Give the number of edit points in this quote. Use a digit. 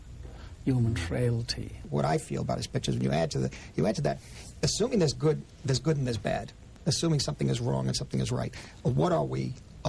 1